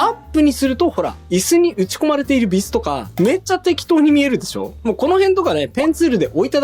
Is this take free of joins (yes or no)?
yes